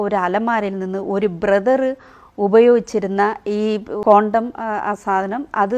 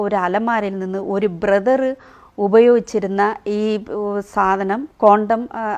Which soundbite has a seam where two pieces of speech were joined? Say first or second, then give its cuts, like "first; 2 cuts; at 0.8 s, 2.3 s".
first; 1 cut; at 3.9 s